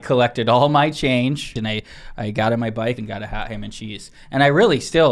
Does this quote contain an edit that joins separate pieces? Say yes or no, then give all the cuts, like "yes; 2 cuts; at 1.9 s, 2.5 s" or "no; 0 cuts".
yes; 2 cuts; at 1.6 s, 3.0 s